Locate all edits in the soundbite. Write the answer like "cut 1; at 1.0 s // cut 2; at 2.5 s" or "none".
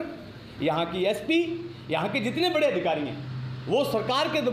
none

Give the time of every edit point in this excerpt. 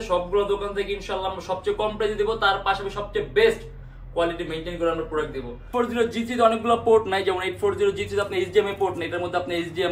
cut 1; at 5.7 s

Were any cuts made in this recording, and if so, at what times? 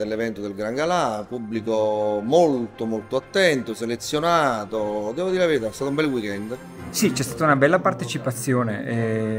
cut 1; at 6.8 s

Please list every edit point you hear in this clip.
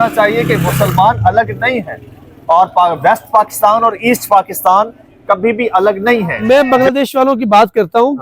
cut 1; at 6.4 s

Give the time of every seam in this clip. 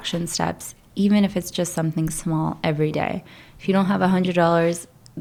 none

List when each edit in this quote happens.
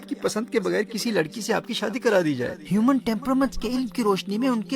cut 1; at 2.6 s

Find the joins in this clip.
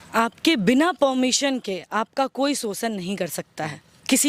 none

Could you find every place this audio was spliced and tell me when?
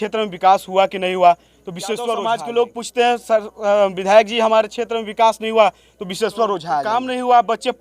cut 1; at 2.2 s // cut 2; at 6.8 s

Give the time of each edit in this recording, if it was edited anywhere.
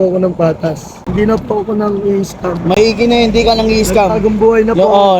cut 1; at 1.0 s

